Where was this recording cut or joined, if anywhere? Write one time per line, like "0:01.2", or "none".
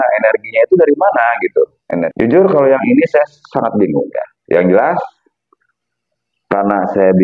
0:02.1